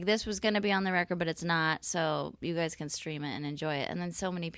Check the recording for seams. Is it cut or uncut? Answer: uncut